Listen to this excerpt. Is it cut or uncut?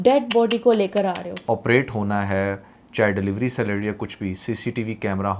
cut